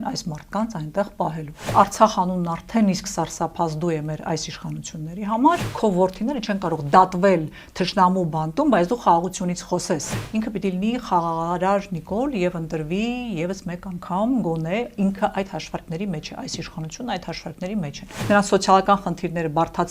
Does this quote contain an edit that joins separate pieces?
yes; 4 cuts; at 1.7 s, 5.7 s, 10.2 s, 18.2 s

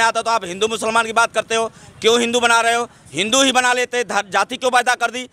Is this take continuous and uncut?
yes; 0 cuts

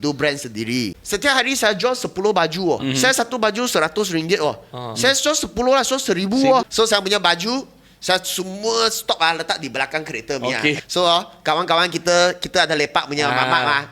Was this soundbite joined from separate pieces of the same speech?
yes; 4 cuts; at 1.0 s, 2.8 s, 6.7 s, 10.8 s

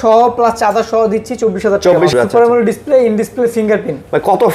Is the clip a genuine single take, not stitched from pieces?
no; 1 cut; at 2.1 s

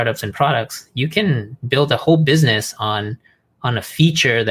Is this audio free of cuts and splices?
yes; 0 cuts

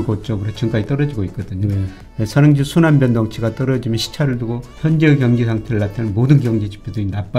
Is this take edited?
yes; 1 cut; at 4.7 s

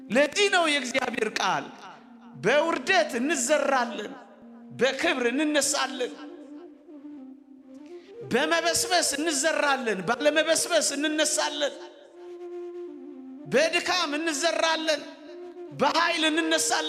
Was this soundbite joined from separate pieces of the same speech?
no; 0 cuts

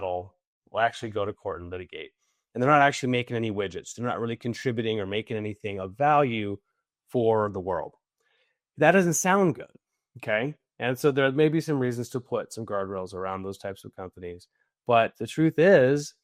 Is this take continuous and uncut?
yes; 0 cuts

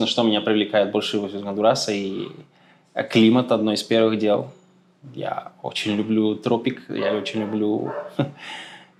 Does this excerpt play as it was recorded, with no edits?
yes; 0 cuts

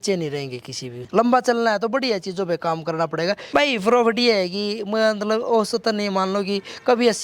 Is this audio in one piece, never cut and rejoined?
no; 2 cuts; at 0.9 s, 3.4 s

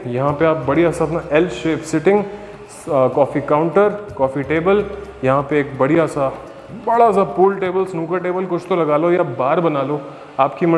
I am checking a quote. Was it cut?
no; 0 cuts

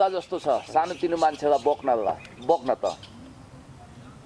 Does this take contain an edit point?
no; 0 cuts

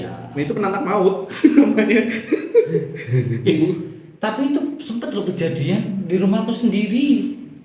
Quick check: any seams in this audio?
no; 0 cuts

